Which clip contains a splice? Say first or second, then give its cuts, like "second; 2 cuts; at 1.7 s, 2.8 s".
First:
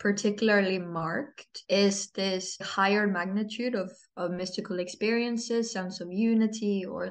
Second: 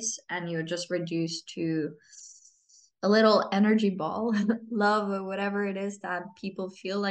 first; 2 cuts; at 1.5 s, 2.7 s